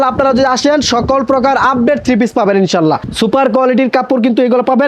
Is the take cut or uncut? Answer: cut